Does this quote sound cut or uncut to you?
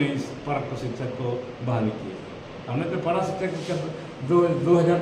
uncut